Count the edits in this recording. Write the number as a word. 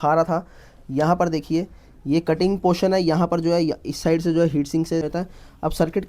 one